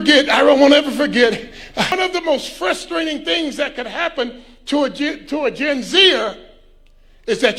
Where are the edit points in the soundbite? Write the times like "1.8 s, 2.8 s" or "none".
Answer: 2.0 s